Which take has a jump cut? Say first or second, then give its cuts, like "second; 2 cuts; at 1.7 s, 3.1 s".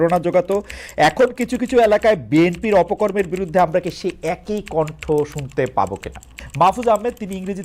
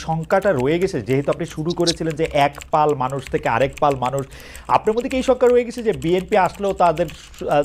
first; 1 cut; at 6.4 s